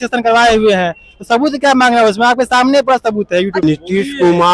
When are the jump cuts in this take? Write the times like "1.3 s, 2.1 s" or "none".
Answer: 3.6 s